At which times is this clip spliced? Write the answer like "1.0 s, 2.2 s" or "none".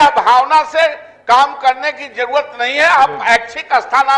none